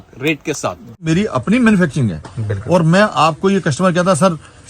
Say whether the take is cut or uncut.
cut